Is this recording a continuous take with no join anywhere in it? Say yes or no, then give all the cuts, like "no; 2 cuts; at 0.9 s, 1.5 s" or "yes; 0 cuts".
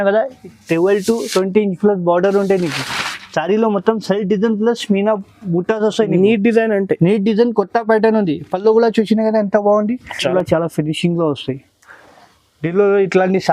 no; 1 cut; at 10.2 s